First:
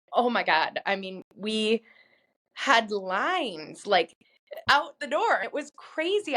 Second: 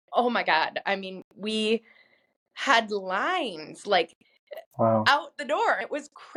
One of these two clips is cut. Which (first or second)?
first